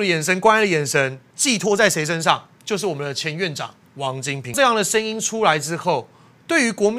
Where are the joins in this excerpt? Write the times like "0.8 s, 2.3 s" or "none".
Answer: 4.5 s